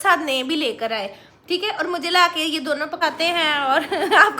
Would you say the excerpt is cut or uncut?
cut